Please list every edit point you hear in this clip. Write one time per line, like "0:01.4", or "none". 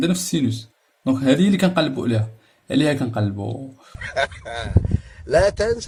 none